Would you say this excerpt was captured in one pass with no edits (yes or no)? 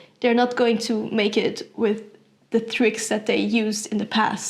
yes